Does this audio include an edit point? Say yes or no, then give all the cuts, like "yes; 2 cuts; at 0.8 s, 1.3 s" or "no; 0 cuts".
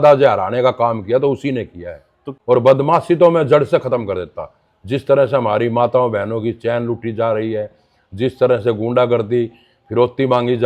yes; 1 cut; at 2.2 s